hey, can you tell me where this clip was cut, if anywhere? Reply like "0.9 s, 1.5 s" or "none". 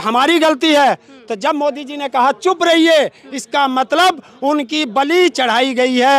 none